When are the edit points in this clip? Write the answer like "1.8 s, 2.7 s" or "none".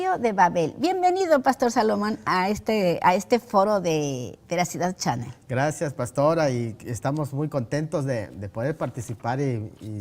3.5 s